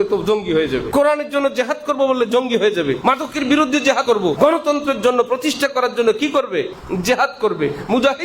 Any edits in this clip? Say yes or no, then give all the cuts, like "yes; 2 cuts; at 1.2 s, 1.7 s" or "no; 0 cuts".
yes; 4 cuts; at 0.9 s, 3.0 s, 4.1 s, 6.8 s